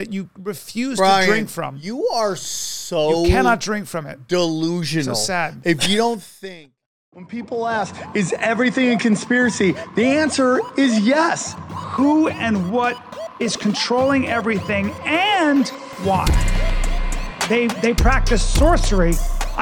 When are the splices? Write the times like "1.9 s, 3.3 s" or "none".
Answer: 7.1 s